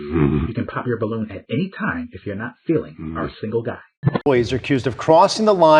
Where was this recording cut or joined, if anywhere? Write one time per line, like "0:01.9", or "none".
0:04.3